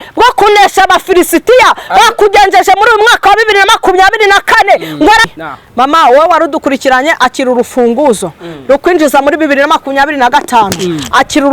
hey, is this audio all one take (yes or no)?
no